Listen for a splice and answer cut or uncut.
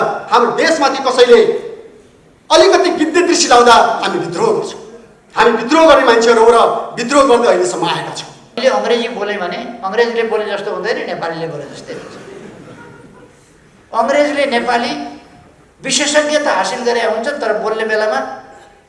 cut